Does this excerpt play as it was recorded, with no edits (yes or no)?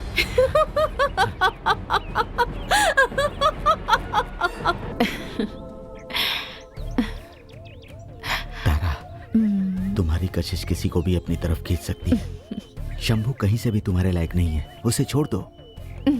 no